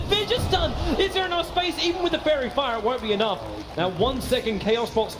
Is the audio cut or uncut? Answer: cut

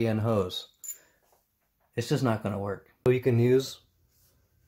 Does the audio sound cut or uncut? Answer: cut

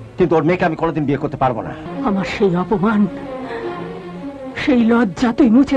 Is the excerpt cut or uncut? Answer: cut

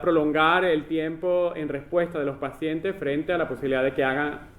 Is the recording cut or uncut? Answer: uncut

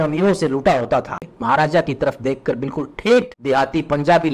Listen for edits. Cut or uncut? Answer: cut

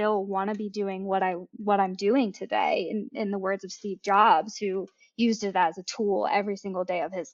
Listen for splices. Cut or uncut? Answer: uncut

